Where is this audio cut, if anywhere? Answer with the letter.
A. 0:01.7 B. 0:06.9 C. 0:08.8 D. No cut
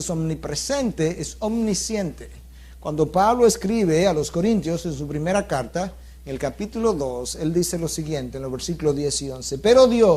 A